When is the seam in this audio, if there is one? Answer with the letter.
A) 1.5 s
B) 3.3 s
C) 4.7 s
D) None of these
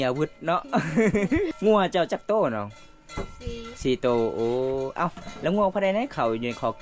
A